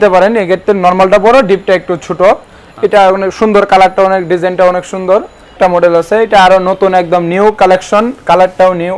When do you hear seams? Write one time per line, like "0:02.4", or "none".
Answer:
0:05.5